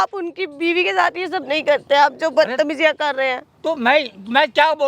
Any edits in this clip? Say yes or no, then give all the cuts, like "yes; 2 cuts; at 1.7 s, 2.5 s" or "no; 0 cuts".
no; 0 cuts